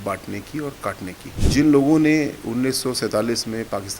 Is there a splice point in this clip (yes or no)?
yes